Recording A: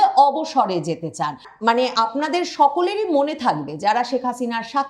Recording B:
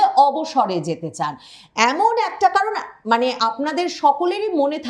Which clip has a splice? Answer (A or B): A